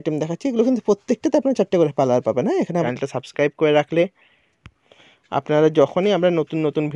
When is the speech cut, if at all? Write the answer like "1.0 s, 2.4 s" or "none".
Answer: 3.0 s

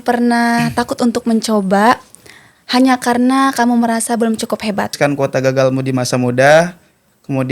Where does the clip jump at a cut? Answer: 4.9 s

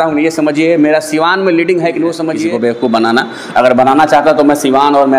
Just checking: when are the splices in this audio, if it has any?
2.5 s

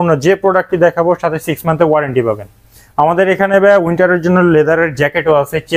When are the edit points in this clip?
none

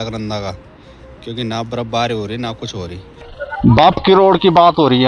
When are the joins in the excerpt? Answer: 3.3 s

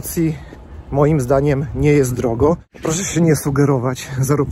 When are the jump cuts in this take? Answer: 2.7 s

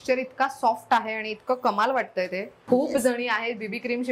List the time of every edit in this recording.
2.5 s

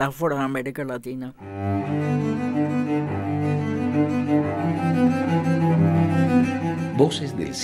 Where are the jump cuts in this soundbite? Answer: 1.4 s

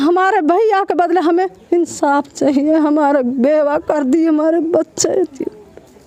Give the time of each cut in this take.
none

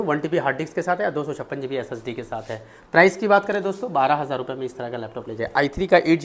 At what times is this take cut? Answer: none

